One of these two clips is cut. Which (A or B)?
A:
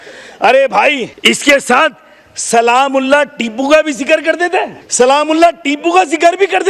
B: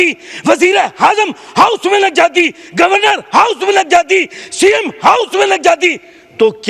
A